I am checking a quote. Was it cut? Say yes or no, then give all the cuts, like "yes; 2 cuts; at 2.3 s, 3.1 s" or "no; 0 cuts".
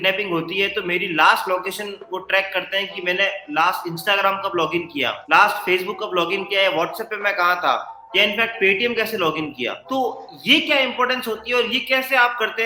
no; 0 cuts